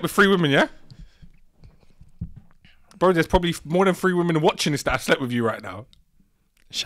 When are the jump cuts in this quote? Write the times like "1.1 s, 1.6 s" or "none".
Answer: none